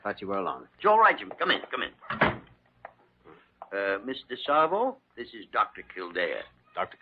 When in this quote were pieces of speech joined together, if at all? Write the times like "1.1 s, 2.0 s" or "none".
none